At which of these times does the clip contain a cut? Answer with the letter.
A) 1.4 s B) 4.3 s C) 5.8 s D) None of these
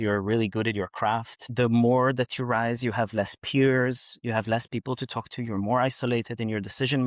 A